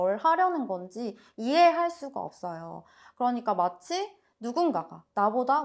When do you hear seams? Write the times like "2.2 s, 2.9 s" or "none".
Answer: none